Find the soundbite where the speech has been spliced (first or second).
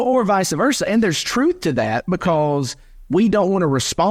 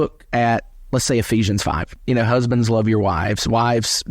second